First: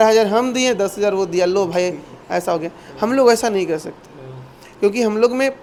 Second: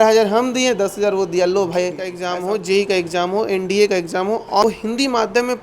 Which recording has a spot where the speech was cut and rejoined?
second; 2 cuts; at 2.2 s, 4.6 s

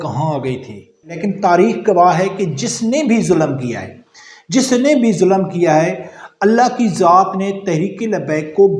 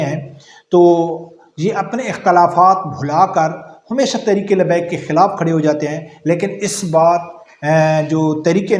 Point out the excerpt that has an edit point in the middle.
first; 1 cut; at 1.2 s

